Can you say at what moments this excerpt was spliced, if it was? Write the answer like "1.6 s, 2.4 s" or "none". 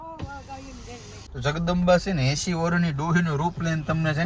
1.2 s